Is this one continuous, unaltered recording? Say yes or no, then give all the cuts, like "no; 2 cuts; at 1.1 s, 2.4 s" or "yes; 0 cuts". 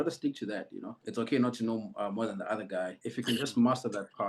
no; 2 cuts; at 1.0 s, 3.0 s